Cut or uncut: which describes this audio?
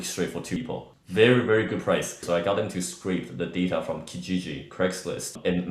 cut